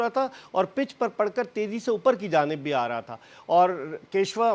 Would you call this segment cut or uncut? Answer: uncut